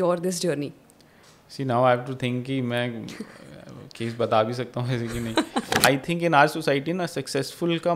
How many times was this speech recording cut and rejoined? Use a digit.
1